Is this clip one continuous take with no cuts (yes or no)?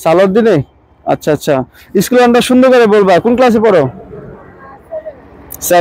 yes